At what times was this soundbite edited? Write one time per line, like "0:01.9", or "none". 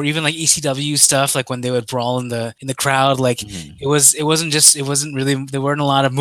0:02.6